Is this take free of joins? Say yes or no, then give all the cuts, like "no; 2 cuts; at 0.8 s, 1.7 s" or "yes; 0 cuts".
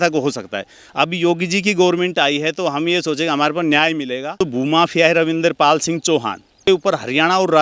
no; 2 cuts; at 4.4 s, 6.6 s